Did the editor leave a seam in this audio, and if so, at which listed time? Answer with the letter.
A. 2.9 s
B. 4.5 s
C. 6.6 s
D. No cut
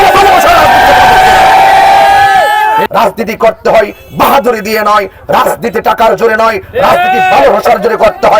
A